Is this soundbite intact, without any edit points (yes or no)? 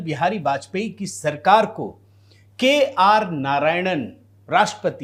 yes